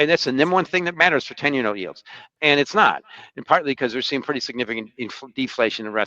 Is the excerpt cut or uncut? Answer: uncut